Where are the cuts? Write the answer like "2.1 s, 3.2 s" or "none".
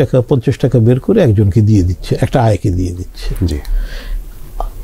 none